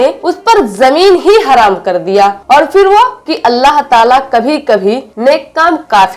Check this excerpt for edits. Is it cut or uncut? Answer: cut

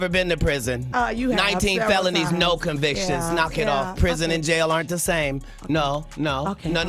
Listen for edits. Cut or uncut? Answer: uncut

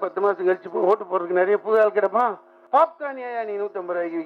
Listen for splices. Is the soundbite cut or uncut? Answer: cut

